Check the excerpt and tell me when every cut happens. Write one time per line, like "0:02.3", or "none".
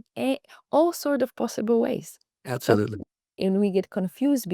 0:03.4